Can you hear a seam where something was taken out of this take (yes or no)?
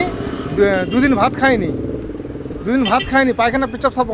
no